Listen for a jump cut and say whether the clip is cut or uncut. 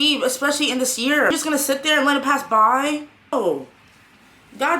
cut